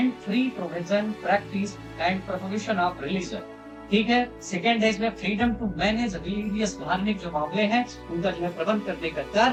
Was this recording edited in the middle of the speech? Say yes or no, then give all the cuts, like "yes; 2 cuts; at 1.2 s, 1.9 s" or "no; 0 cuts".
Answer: no; 0 cuts